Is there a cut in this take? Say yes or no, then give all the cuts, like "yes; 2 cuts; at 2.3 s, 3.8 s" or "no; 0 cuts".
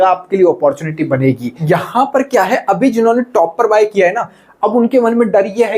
yes; 1 cut; at 1.6 s